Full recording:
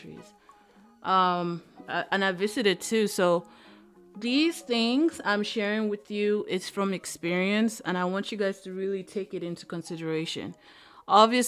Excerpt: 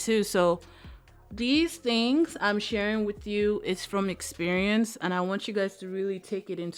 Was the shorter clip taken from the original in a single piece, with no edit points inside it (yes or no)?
yes